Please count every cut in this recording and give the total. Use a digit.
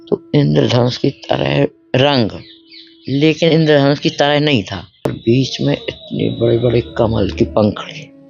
1